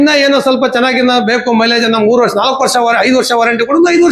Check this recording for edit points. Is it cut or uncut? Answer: uncut